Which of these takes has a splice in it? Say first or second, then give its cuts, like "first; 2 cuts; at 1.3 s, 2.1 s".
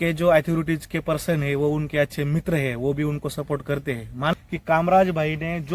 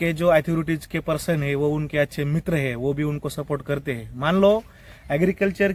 first; 1 cut; at 4.3 s